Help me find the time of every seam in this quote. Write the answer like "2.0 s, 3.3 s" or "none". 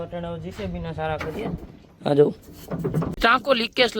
3.1 s